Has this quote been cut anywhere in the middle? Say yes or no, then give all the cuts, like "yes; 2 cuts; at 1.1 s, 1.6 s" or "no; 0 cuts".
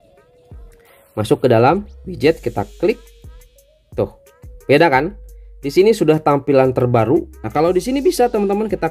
yes; 1 cut; at 7.4 s